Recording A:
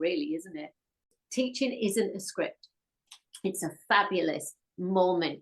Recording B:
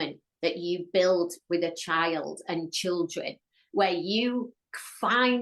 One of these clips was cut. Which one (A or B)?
A